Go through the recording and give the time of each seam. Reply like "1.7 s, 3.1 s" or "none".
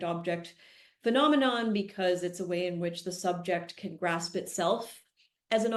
none